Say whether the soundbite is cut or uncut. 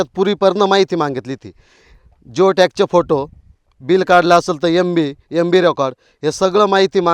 uncut